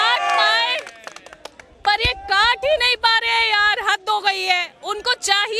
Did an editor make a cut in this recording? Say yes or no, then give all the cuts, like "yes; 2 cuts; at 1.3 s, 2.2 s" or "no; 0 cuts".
no; 0 cuts